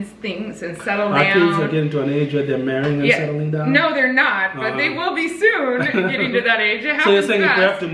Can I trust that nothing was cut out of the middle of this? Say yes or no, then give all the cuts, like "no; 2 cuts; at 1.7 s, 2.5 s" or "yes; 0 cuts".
yes; 0 cuts